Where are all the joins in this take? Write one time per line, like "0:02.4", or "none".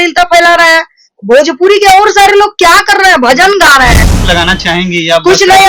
0:04.0